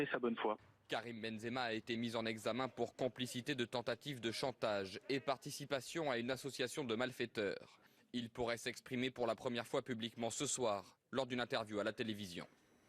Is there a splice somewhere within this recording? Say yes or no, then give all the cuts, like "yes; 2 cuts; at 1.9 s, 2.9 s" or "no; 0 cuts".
yes; 1 cut; at 4.2 s